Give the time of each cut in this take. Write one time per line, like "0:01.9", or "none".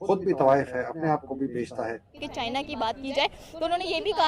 0:02.2